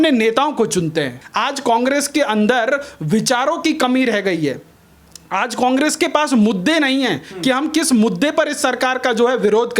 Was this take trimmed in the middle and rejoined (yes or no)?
yes